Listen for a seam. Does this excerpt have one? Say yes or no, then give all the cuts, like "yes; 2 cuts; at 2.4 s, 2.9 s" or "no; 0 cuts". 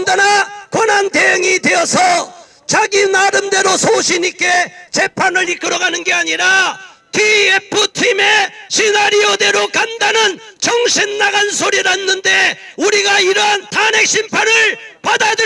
yes; 1 cut; at 13.7 s